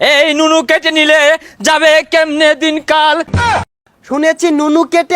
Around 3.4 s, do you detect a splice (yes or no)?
yes